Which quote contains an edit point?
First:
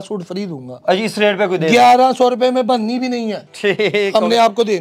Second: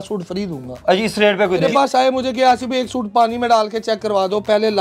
second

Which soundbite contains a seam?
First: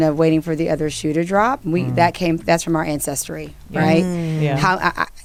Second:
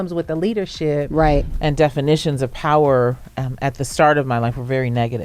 second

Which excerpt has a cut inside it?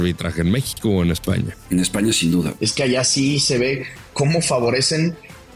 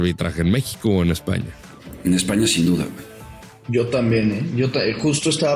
first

